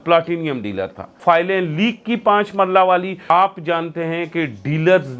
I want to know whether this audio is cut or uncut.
cut